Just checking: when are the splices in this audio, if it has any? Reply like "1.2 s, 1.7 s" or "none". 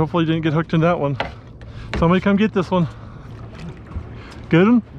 3.2 s